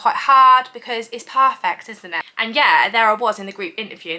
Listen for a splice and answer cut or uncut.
cut